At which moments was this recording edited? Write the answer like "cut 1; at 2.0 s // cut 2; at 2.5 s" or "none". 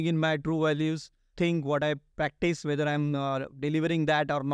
cut 1; at 1.3 s // cut 2; at 2.1 s

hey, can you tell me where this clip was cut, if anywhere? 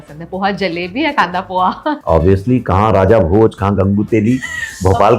none

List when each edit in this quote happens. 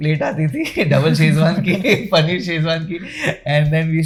none

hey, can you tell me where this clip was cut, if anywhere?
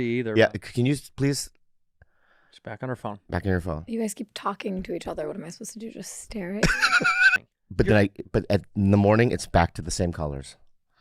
cut 1; at 7.5 s

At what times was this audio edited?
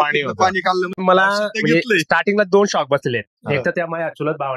cut 1; at 0.9 s

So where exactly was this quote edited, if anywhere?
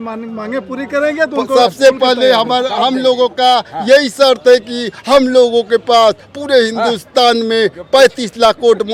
none

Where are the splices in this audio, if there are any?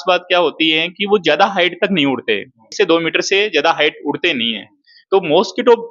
cut 1; at 2.6 s

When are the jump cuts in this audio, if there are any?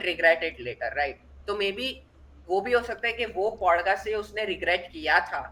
none

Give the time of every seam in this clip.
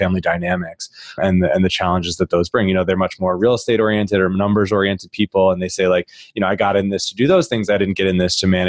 none

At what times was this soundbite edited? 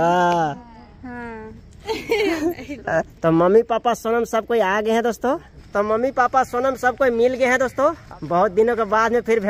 cut 1; at 0.9 s // cut 2; at 3.1 s // cut 3; at 5.6 s // cut 4; at 8.1 s

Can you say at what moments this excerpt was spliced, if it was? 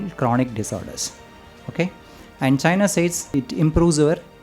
cut 1; at 3.2 s

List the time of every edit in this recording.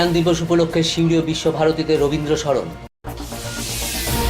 cut 1; at 3.0 s

